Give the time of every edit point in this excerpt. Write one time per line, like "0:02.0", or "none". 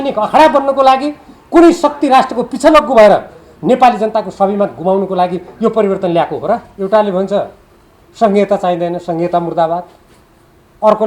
0:06.7